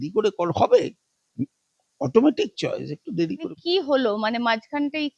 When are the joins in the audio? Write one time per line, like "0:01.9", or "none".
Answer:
0:03.5